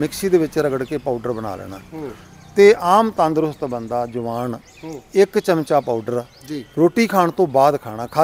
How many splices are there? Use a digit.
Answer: 0